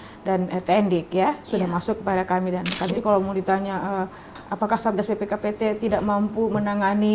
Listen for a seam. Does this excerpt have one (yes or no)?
yes